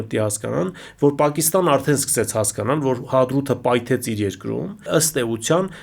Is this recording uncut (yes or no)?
no